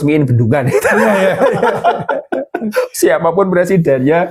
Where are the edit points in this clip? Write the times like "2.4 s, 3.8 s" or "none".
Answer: none